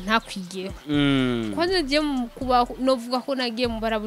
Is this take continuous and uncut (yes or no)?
yes